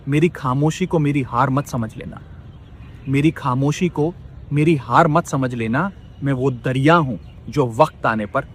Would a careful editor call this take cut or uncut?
uncut